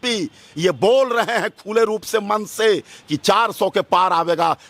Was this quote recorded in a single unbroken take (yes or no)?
yes